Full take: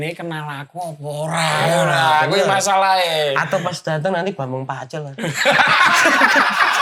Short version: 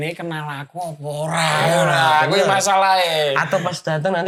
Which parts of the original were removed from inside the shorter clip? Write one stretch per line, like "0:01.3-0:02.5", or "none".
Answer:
none